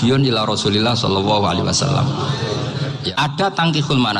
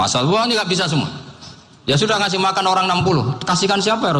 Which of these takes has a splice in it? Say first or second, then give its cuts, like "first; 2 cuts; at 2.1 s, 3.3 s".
first; 1 cut; at 3.1 s